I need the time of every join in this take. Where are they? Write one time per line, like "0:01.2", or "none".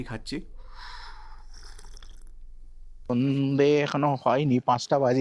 0:03.1